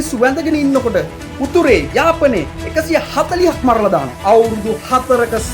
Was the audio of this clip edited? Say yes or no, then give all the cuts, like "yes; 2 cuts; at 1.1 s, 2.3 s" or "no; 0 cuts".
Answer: yes; 1 cut; at 4.1 s